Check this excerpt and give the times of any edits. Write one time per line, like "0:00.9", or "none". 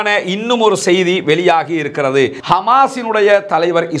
0:02.4